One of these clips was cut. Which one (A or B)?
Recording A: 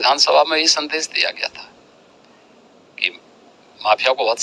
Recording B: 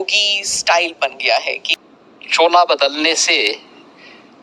B